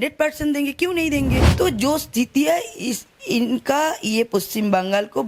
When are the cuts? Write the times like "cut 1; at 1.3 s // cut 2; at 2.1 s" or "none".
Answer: cut 1; at 1.5 s